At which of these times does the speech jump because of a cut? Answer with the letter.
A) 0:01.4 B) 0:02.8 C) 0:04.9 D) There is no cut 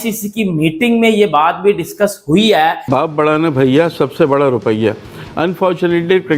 B